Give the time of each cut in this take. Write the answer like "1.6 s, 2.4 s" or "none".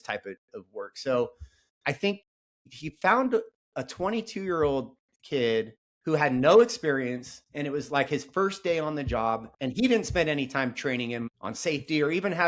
9.5 s